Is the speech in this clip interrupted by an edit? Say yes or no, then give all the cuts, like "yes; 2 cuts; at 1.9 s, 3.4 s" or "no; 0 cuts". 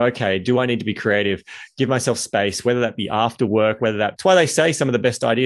yes; 1 cut; at 4.1 s